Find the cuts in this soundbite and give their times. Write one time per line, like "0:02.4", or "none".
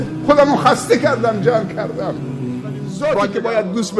0:02.9